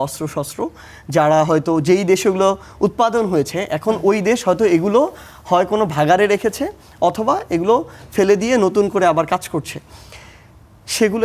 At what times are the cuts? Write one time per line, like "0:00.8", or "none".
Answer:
none

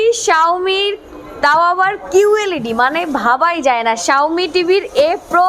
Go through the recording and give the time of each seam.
none

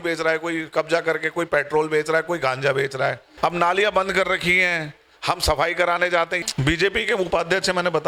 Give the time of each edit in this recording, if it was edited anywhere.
0:03.3
0:06.3

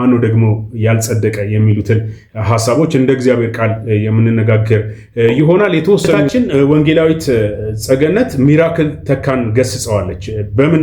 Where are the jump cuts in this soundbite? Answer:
0:06.2

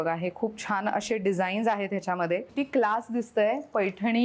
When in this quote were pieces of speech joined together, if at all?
0:02.5

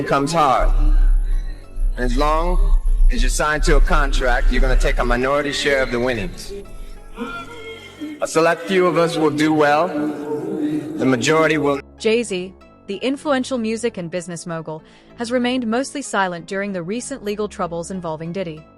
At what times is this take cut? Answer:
0:11.8

